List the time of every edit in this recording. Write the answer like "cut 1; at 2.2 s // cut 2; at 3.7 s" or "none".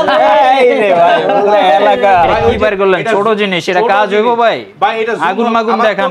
cut 1; at 2.6 s